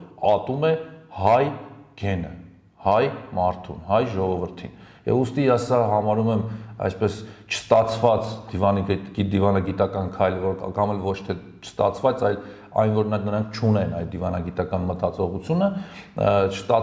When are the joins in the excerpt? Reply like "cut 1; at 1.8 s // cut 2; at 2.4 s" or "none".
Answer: none